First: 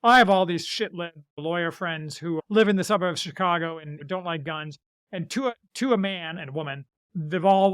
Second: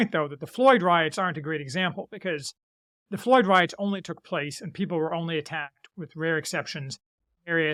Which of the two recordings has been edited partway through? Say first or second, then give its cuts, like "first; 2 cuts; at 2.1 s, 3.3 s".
first; 3 cuts; at 1.4 s, 2.4 s, 4.0 s